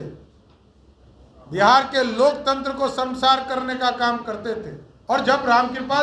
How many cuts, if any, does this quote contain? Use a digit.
1